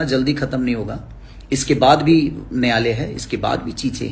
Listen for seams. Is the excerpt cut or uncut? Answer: uncut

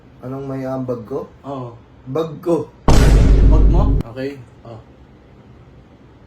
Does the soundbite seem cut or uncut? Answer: cut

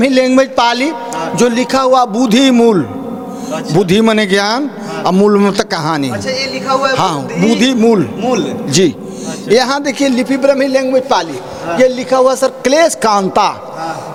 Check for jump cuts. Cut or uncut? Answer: uncut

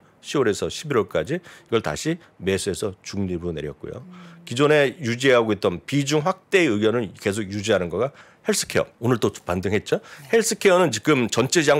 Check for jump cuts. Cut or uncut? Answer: cut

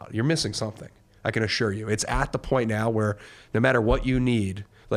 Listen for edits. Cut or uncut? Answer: uncut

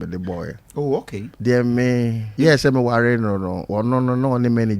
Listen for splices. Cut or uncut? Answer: cut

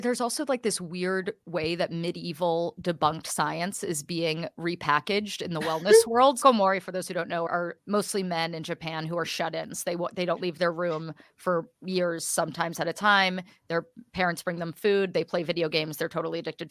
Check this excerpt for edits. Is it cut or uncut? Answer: cut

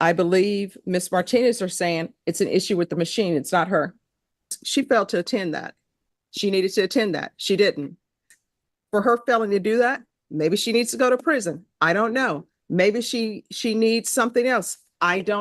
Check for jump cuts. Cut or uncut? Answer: cut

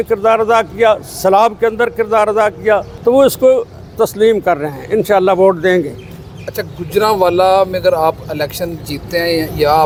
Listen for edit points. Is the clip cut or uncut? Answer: uncut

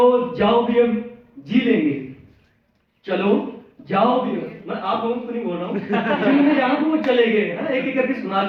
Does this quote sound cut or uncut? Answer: uncut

